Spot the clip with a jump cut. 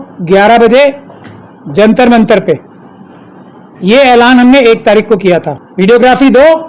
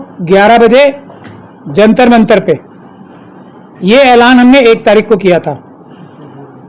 first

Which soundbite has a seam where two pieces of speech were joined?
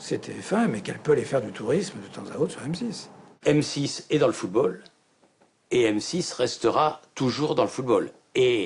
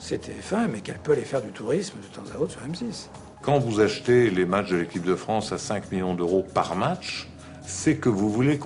second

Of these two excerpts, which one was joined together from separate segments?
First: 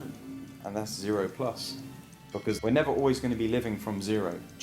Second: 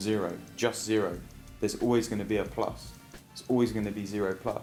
first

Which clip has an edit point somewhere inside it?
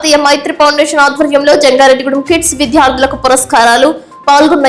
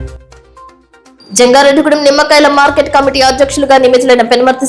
second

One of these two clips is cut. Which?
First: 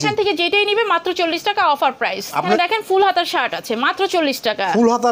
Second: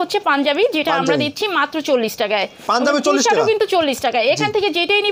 first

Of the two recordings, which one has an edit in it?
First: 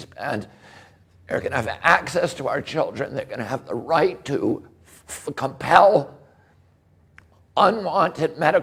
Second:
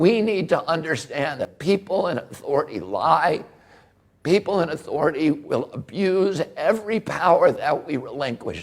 second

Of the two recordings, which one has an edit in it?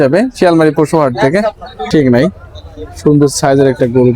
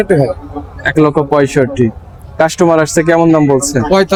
first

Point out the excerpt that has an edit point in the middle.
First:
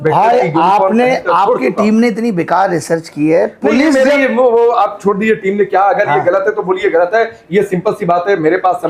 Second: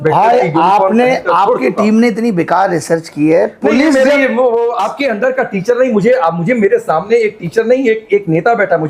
second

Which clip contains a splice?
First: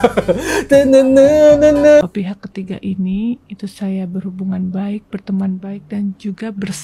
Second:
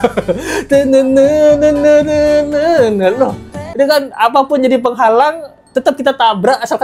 first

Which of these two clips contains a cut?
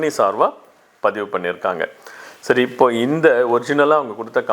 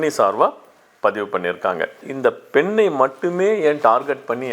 second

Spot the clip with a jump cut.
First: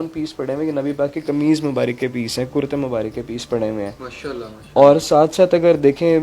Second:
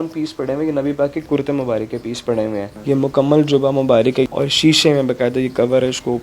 second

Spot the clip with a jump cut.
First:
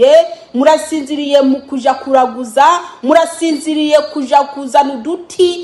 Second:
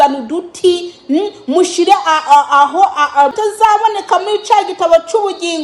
second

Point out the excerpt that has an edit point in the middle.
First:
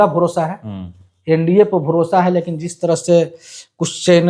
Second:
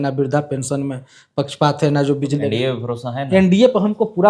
second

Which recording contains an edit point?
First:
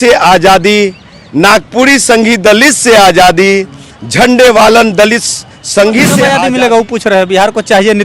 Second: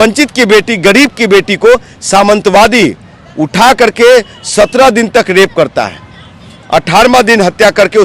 first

